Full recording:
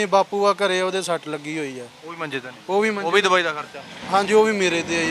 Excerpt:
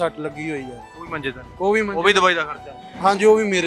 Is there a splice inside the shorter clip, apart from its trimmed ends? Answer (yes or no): no